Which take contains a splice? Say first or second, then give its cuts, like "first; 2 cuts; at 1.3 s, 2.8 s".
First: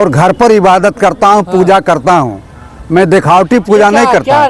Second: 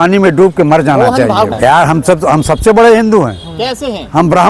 second; 1 cut; at 1.5 s